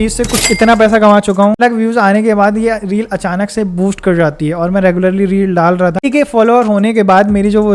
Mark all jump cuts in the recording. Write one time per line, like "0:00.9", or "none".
0:01.6
0:06.0

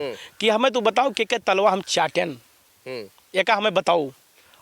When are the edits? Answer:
none

